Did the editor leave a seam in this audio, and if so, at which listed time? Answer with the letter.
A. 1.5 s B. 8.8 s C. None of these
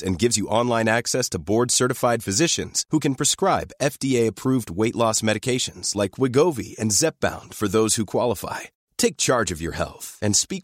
C